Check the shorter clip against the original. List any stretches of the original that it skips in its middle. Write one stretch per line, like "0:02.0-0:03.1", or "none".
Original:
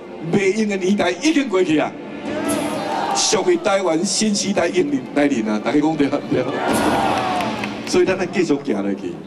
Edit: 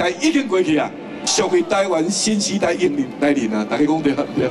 0:02.3-0:03.2